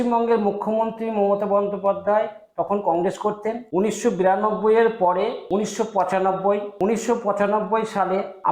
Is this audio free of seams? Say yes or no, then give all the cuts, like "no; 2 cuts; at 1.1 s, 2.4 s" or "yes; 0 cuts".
yes; 0 cuts